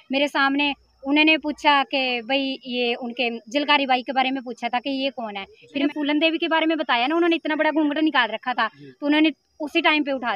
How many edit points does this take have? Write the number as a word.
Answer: one